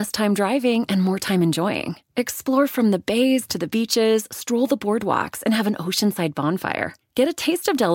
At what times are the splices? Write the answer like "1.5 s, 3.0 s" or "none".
none